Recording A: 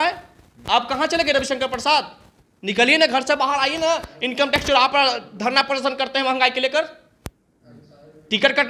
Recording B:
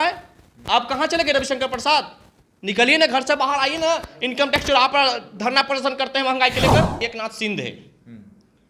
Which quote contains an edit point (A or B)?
B